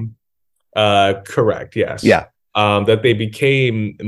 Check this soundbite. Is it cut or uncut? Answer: uncut